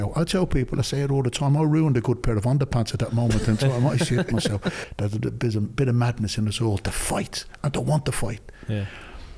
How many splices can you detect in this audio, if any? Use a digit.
1